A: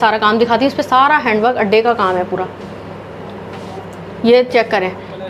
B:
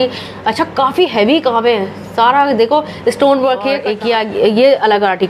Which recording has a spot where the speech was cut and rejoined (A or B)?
B